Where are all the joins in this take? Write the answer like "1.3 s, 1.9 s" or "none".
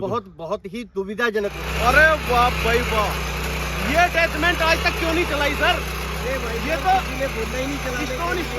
1.6 s